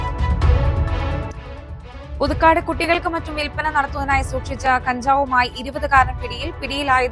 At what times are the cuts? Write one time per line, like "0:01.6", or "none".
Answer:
none